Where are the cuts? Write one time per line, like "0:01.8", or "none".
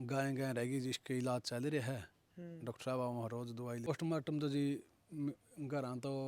0:03.9